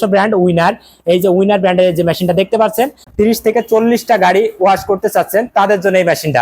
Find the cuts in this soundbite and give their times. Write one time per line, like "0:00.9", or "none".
0:03.0